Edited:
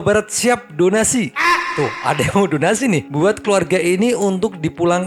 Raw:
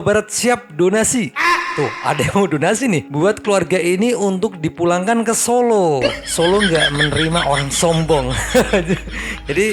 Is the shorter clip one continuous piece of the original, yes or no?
yes